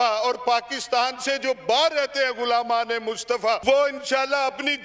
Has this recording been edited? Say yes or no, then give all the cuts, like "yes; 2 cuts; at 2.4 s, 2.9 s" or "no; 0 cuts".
yes; 1 cut; at 3.6 s